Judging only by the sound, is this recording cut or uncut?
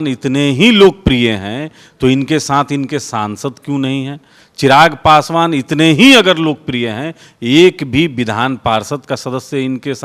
uncut